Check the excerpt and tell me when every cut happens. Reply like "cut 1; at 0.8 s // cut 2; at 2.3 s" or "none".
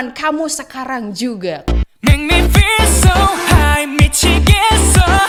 none